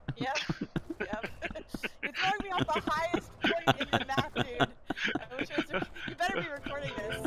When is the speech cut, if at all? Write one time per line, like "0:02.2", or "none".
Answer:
none